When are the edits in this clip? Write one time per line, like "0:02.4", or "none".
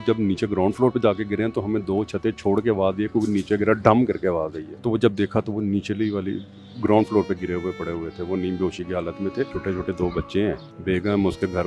0:04.6
0:09.6
0:10.7